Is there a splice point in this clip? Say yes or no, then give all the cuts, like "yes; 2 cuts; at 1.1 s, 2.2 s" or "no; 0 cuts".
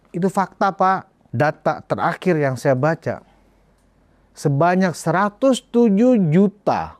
yes; 1 cut; at 1.2 s